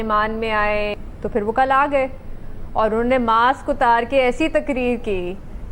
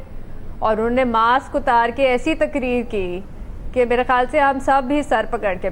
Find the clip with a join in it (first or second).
first